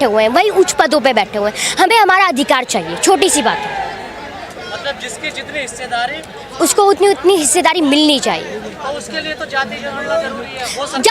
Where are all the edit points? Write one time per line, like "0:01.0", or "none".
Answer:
none